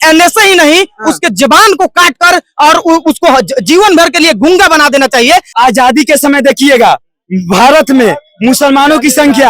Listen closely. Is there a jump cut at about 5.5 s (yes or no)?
yes